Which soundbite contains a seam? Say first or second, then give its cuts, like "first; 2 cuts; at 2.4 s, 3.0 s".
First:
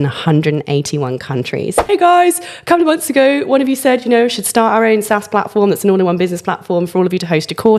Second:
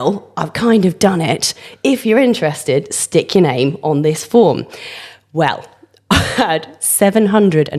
first; 1 cut; at 1.9 s